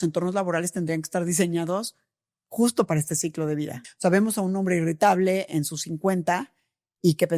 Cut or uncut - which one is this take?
cut